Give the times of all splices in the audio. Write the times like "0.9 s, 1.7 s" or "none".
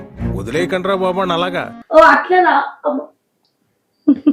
none